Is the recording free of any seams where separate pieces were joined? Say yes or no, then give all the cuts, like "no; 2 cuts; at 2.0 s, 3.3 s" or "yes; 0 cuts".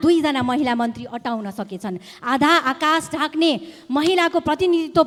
yes; 0 cuts